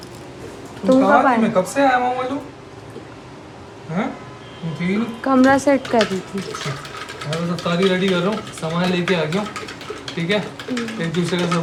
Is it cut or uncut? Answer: uncut